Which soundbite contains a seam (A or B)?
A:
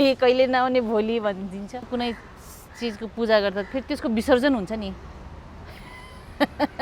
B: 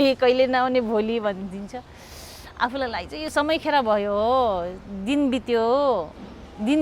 A